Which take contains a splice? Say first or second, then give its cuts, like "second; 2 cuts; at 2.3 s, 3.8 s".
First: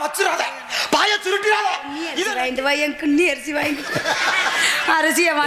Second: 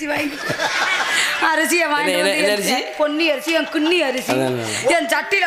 first; 1 cut; at 2.2 s